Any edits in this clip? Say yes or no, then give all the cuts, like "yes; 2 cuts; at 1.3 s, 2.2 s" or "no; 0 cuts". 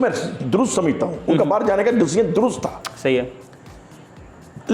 no; 0 cuts